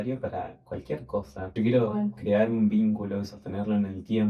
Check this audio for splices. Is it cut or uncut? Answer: cut